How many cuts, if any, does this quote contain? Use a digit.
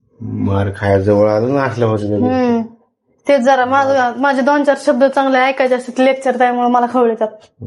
0